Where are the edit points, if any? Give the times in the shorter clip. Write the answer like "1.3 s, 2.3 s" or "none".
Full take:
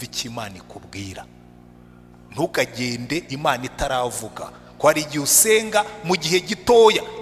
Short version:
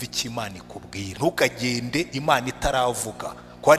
1.1 s